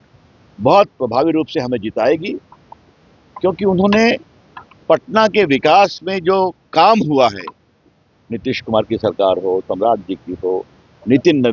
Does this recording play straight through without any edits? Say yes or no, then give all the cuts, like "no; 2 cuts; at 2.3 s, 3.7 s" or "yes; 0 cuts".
yes; 0 cuts